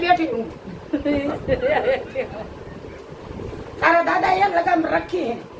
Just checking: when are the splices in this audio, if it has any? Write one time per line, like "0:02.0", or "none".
none